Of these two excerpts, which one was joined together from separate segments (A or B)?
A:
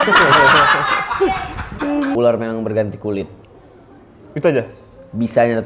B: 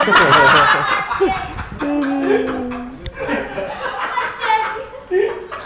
A